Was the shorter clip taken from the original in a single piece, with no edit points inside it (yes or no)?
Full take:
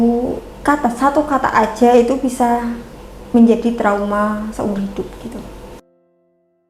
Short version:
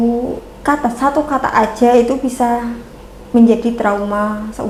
yes